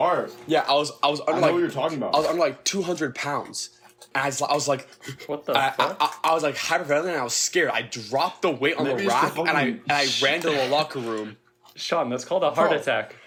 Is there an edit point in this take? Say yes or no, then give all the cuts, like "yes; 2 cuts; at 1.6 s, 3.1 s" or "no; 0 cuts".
no; 0 cuts